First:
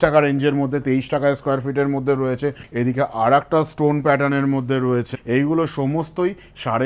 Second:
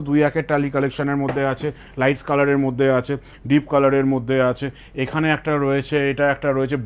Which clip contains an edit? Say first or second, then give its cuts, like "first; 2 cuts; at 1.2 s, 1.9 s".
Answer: first; 2 cuts; at 2.6 s, 5.2 s